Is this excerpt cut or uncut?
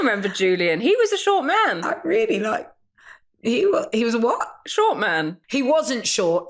uncut